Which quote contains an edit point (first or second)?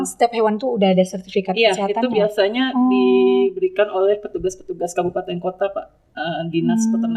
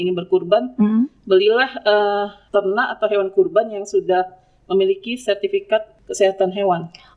second